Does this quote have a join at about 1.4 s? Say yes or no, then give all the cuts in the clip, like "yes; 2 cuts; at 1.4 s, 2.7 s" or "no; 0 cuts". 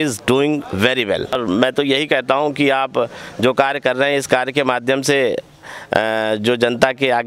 yes; 1 cut; at 1.4 s